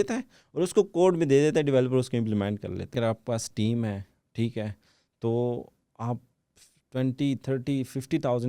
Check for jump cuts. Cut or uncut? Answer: cut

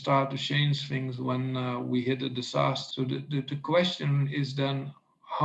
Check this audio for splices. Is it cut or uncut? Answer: cut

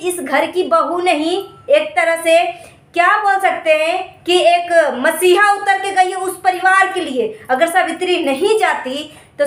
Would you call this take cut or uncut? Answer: uncut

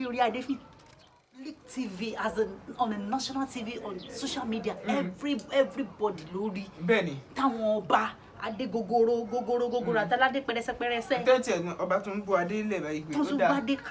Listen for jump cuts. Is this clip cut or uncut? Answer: cut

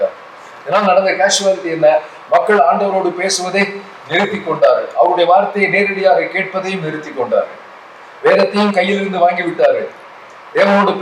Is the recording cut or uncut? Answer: uncut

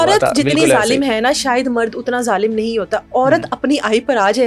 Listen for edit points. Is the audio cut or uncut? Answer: uncut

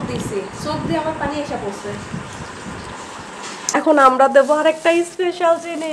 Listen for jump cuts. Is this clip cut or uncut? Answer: cut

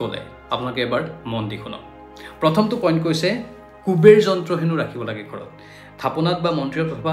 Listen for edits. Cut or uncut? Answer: uncut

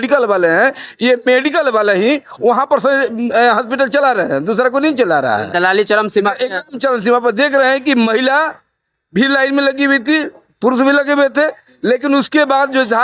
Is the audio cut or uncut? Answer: uncut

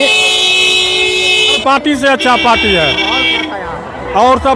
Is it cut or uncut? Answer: cut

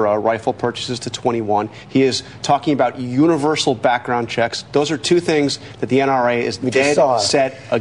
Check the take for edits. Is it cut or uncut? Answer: uncut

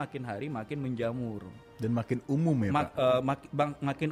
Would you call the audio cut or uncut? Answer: uncut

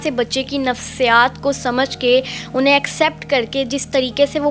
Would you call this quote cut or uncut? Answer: uncut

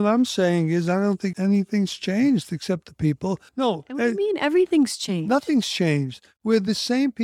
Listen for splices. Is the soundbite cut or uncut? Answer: cut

